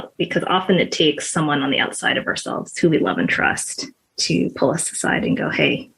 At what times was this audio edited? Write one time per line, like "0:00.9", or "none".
none